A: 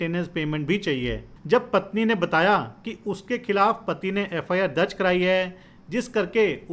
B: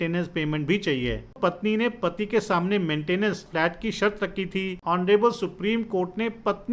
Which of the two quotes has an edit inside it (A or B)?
B